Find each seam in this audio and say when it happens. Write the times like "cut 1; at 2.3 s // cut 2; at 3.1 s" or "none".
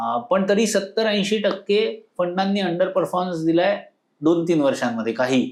none